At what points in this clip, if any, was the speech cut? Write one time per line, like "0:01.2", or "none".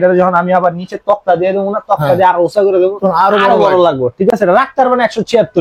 none